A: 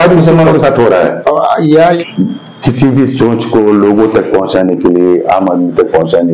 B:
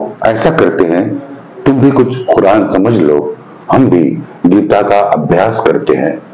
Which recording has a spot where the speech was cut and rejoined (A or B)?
A